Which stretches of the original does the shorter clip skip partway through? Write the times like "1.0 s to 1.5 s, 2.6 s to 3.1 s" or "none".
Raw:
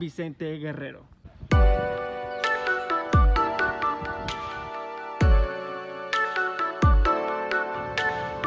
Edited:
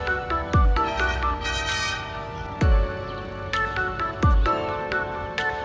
none